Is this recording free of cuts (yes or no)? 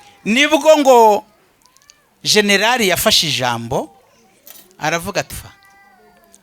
no